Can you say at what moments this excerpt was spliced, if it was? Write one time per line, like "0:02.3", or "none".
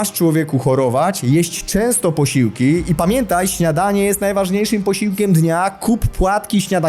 none